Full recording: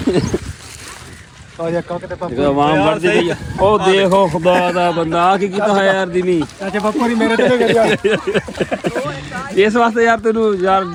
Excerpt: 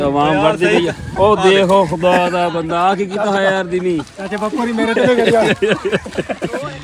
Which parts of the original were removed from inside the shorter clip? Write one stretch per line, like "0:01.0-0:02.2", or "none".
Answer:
none